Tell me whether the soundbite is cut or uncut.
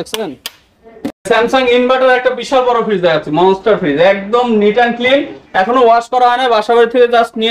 cut